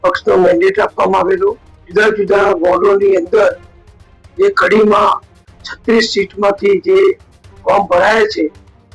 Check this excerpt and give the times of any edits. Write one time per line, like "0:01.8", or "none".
0:01.7